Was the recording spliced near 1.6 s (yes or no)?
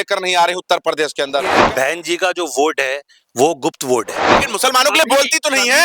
yes